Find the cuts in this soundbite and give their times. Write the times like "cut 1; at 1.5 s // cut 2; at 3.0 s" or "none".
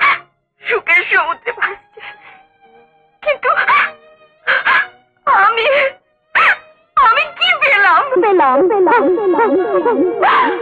none